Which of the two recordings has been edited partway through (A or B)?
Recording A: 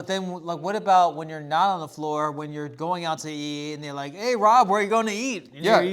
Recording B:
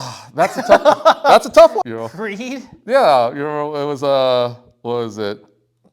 B